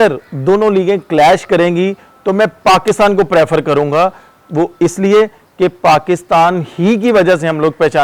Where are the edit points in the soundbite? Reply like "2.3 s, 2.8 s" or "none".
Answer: none